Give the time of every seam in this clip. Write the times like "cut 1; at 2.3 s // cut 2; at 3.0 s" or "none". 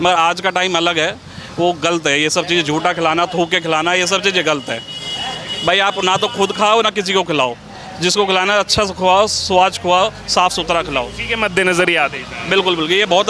none